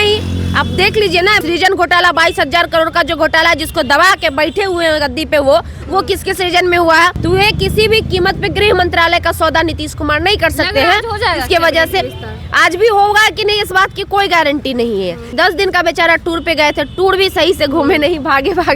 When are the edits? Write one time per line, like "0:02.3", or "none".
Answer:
0:01.4
0:07.2
0:15.3